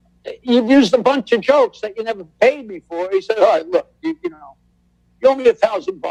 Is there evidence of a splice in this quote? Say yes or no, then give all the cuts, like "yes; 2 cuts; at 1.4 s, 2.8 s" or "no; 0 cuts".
no; 0 cuts